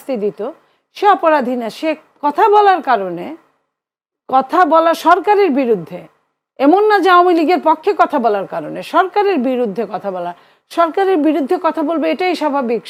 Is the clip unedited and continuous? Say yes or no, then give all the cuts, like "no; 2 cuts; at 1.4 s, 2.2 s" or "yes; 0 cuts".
yes; 0 cuts